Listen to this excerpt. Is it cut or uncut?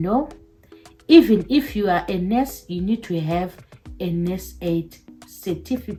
uncut